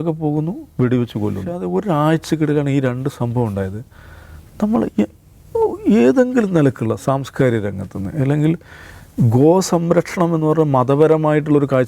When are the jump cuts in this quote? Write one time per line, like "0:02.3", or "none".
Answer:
0:01.6